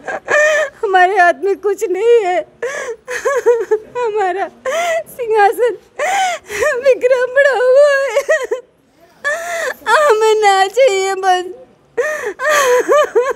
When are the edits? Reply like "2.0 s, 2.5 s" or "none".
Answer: none